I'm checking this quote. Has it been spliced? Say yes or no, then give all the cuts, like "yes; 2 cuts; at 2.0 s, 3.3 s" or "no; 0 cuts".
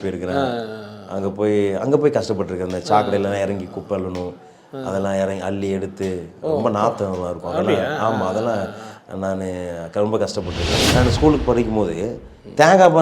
yes; 1 cut; at 10.8 s